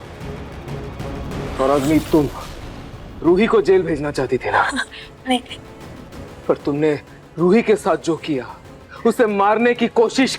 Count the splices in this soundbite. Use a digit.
1